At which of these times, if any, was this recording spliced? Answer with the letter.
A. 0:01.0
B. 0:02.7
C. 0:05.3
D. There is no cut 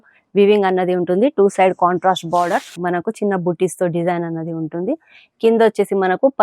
B